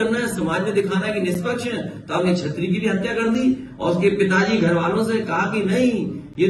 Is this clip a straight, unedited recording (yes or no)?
yes